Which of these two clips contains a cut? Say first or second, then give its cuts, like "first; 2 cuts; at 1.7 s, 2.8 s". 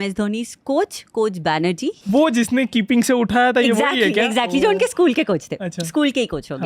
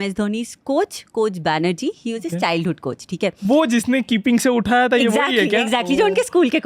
first; 1 cut; at 2.0 s